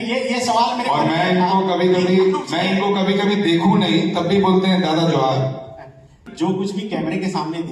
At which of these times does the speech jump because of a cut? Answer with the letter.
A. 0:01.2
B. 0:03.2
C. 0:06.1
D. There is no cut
C